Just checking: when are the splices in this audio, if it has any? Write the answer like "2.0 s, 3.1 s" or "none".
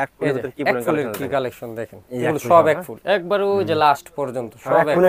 none